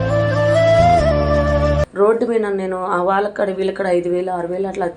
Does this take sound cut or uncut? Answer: cut